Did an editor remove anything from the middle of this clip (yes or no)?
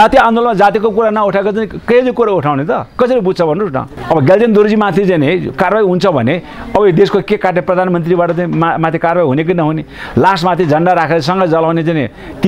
yes